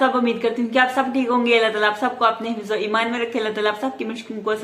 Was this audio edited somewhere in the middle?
no; 0 cuts

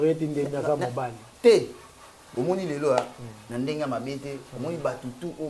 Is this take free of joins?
no; 1 cut; at 2.2 s

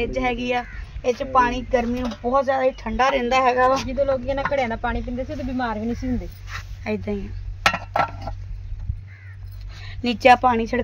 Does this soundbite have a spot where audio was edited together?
no; 0 cuts

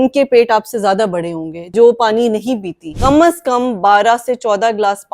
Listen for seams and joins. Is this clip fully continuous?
no; 2 cuts; at 1.7 s, 2.9 s

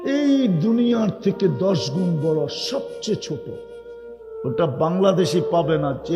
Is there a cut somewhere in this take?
no; 0 cuts

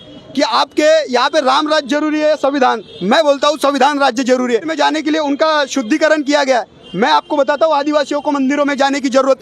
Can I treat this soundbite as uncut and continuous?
no; 1 cut; at 4.7 s

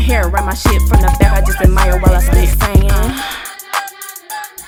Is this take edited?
no; 0 cuts

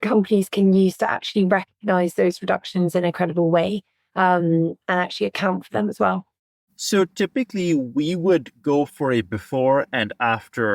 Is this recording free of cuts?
yes; 0 cuts

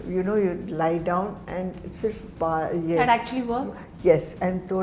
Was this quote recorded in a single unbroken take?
yes; 0 cuts

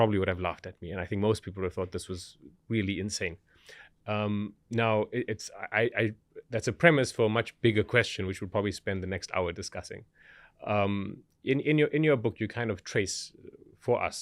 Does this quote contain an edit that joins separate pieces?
no; 0 cuts

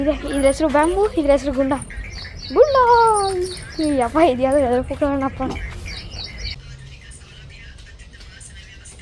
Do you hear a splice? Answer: yes; 1 cut; at 6.5 s

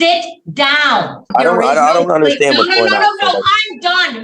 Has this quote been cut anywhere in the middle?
yes; 1 cut; at 1.3 s

